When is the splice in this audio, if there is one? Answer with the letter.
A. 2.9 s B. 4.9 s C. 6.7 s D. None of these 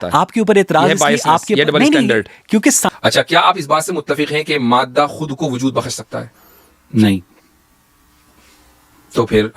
A